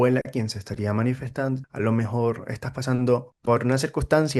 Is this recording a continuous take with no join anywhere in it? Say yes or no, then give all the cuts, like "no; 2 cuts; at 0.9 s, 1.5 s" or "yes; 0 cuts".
no; 2 cuts; at 1.7 s, 3.3 s